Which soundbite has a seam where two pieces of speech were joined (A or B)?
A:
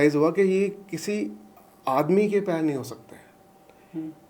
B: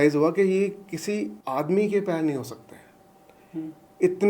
B